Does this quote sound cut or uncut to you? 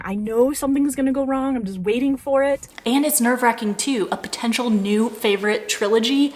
cut